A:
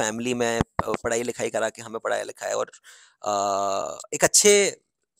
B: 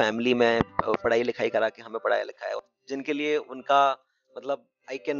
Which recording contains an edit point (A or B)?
B